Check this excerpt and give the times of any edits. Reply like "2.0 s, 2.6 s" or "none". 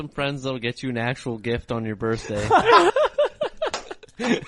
2.9 s